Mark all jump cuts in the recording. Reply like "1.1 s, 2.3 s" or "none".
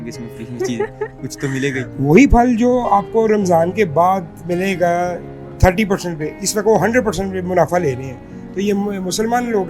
1.9 s